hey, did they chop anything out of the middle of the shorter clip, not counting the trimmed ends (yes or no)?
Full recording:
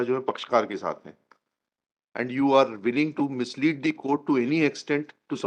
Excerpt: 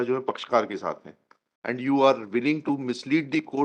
yes